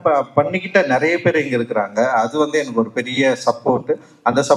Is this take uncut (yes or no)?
yes